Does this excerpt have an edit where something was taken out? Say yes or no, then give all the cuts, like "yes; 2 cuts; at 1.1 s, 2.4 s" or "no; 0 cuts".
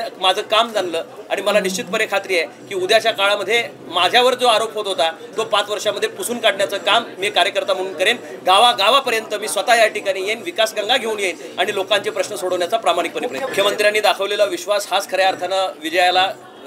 yes; 1 cut; at 13.5 s